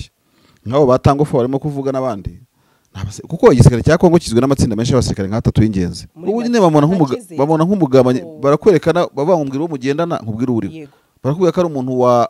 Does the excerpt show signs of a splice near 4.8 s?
no; 1 cut; at 6.0 s

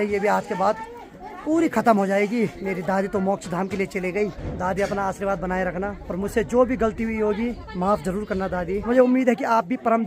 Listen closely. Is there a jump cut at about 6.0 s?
yes; 5 cuts; at 2.6 s, 4.4 s, 6.0 s, 7.6 s, 8.8 s

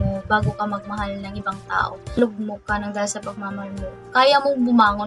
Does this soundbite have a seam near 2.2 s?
yes; 1 cut; at 2.2 s

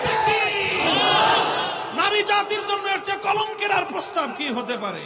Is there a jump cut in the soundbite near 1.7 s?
yes; 1 cut; at 1.7 s

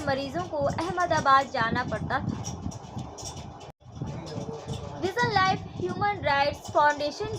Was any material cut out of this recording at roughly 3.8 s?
yes; 1 cut; at 3.8 s

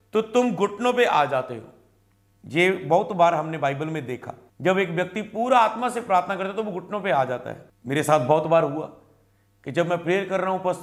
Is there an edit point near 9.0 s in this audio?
no; 0 cuts

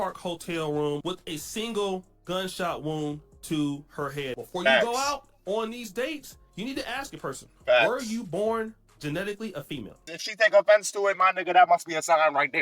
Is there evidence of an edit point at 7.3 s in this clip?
no; 3 cuts; at 1.0 s, 4.4 s, 10.2 s

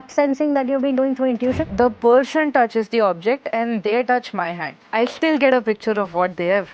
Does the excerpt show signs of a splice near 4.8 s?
yes; 2 cuts; at 1.6 s, 4.8 s

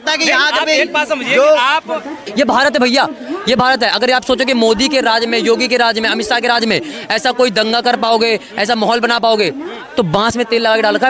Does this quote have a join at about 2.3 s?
yes; 1 cut; at 2.3 s

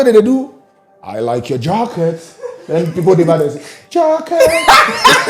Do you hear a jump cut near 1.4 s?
no; 0 cuts

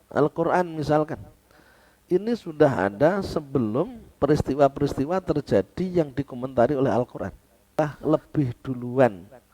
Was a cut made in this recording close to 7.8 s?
yes; 1 cut; at 7.8 s

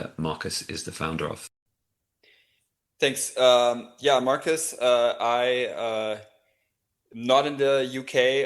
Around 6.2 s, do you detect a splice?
no; 1 cut; at 1.5 s

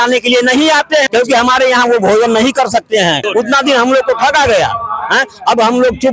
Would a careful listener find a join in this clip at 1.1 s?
yes; 2 cuts; at 1.1 s, 3.2 s

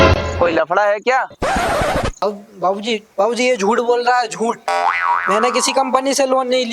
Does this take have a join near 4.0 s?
no; 1 cut; at 2.2 s

